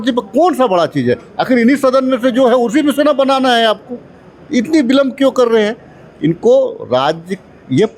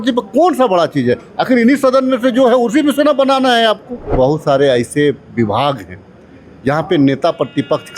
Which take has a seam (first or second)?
second